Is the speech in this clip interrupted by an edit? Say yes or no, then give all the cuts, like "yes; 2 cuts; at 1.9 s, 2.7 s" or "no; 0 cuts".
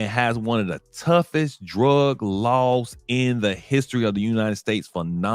no; 0 cuts